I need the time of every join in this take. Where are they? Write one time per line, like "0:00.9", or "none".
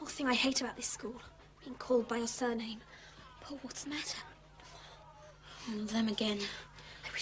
0:03.9